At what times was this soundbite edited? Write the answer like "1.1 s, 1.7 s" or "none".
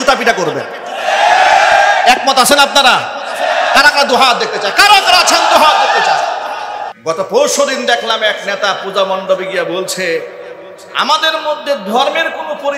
6.9 s

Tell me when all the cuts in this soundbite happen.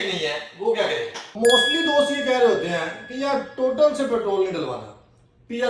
1.2 s

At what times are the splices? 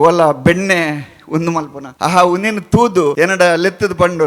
1.8 s, 3.1 s

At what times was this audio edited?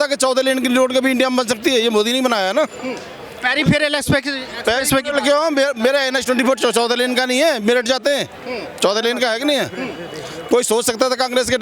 none

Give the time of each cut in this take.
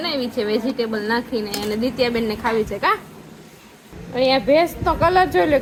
none

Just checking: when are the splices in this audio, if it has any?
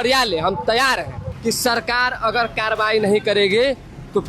1.2 s

